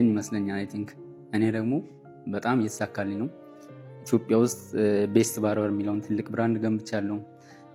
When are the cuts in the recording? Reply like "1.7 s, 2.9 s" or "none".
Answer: none